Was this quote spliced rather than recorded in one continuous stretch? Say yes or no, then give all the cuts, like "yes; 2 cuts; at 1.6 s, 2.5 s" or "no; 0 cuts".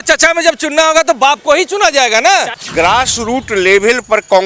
yes; 1 cut; at 2.6 s